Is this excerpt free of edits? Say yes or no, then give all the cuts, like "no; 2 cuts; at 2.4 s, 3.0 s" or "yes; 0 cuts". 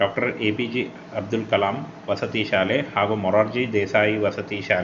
yes; 0 cuts